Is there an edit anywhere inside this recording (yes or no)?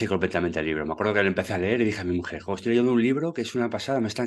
no